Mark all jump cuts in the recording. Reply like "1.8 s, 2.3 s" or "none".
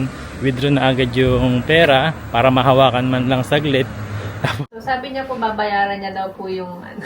4.6 s